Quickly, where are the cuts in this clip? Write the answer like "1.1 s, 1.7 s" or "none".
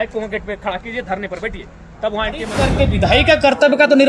2.6 s